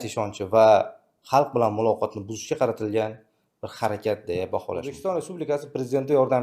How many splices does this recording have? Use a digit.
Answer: 1